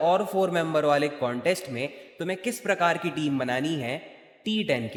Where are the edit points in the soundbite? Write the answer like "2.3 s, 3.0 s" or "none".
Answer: none